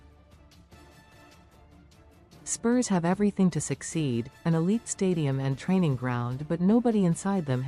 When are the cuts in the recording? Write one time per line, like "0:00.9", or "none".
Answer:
0:01.7